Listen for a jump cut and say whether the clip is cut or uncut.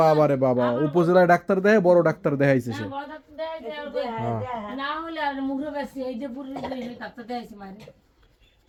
uncut